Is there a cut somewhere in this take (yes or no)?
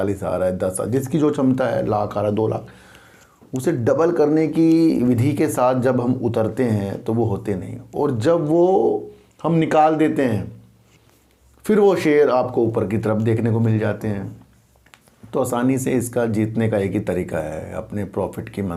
no